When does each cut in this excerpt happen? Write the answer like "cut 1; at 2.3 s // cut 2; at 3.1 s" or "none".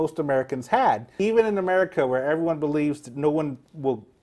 cut 1; at 1.1 s